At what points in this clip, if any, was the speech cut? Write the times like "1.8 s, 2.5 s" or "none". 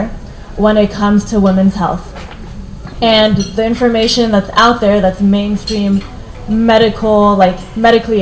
none